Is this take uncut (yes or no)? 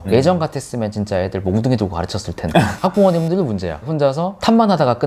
yes